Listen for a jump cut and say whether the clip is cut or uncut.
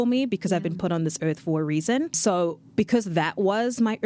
cut